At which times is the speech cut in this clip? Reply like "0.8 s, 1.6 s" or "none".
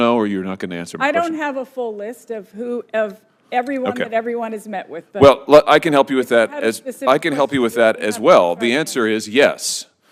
none

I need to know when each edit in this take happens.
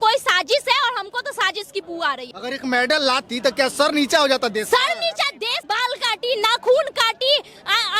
2.3 s, 5.5 s

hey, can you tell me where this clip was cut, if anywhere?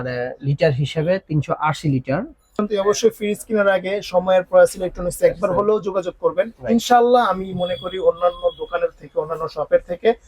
2.6 s

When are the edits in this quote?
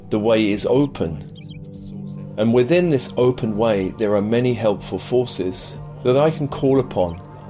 none

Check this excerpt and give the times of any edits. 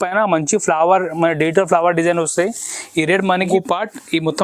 3.4 s

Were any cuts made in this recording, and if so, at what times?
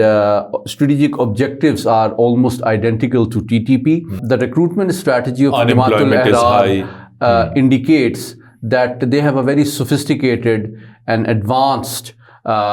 4.2 s

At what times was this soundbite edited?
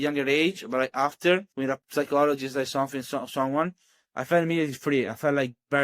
1.5 s

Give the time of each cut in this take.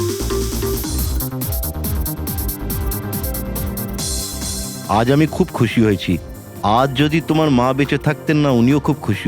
4.8 s

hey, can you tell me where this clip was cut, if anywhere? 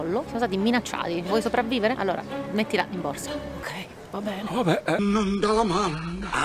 1.2 s

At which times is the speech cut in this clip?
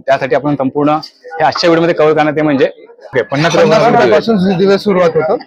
3.1 s

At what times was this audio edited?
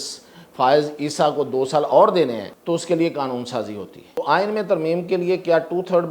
2.5 s, 4.2 s

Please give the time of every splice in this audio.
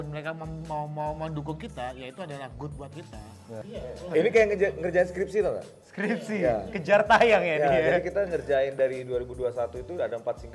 3.9 s

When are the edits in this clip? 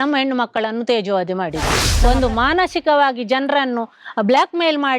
1.8 s

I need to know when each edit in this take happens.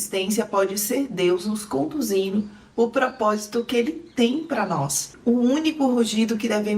5.0 s

